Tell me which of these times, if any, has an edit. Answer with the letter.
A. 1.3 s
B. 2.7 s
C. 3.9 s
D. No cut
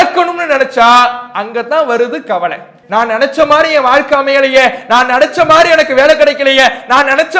B